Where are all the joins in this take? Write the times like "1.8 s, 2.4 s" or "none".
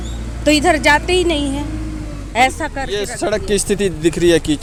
none